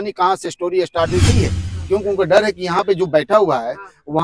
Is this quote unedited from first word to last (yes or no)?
no